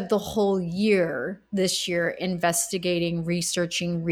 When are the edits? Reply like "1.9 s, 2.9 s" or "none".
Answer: none